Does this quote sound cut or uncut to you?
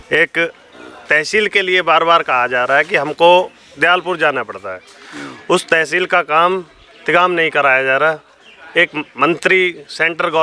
uncut